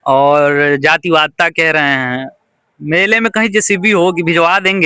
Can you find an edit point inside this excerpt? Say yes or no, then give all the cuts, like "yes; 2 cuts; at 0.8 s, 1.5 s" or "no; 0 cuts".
no; 0 cuts